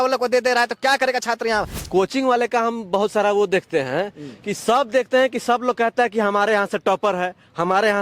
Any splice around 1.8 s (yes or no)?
yes